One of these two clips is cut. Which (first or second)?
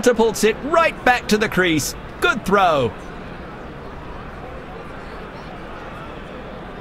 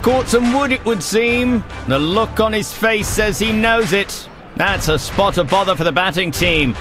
first